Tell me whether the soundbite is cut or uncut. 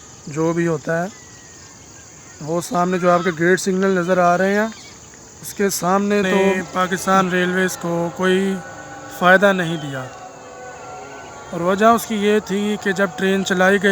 cut